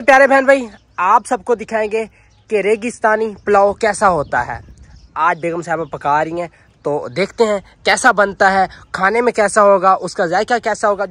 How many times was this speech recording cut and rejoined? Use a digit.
0